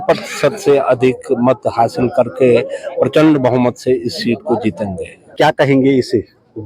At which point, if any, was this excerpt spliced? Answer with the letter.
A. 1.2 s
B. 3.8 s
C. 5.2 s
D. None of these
C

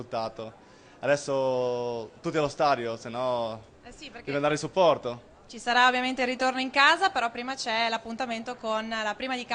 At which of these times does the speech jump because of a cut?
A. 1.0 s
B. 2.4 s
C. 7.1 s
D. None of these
B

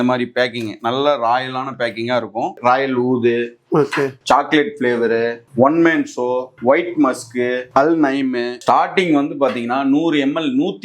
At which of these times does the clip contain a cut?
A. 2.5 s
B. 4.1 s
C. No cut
A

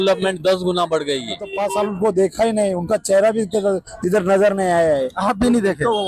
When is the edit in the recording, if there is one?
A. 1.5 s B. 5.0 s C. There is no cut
A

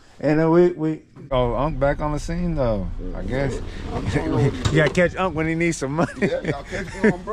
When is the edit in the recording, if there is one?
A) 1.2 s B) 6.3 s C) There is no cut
A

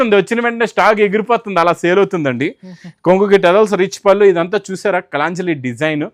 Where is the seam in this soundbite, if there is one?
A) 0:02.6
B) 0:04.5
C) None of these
C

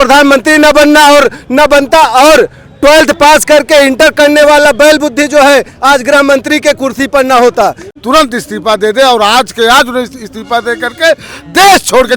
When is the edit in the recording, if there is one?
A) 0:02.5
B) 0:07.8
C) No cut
B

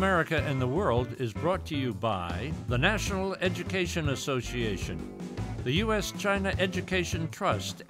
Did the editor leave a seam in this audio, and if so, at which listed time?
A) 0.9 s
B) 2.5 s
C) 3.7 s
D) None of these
B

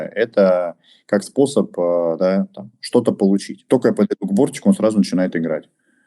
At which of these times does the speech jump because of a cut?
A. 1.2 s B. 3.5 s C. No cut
B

